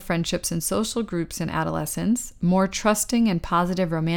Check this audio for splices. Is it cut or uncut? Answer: uncut